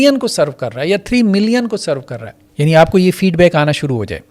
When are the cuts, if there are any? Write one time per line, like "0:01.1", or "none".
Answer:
0:02.5